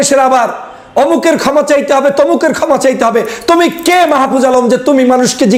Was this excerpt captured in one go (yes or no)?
yes